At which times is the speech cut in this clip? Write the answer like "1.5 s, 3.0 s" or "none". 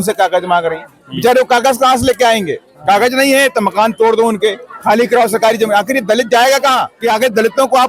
6.9 s